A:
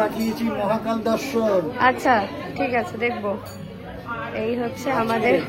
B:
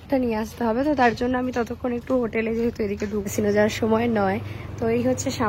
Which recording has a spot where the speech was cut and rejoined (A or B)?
B